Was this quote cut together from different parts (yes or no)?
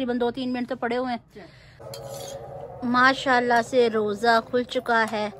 yes